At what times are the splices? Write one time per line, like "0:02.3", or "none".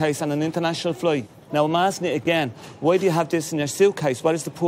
0:01.4